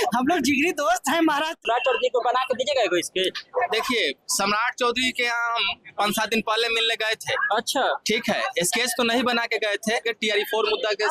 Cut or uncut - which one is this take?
cut